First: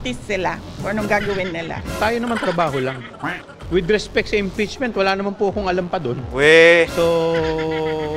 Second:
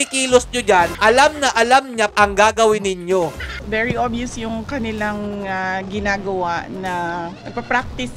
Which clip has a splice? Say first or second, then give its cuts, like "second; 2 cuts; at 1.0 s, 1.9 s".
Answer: second; 3 cuts; at 0.9 s, 2.1 s, 3.5 s